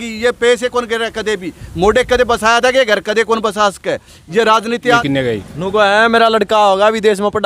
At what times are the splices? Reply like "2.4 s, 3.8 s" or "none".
5.0 s